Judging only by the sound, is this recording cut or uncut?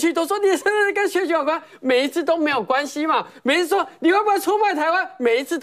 uncut